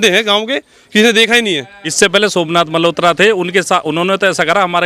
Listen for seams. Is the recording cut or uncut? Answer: cut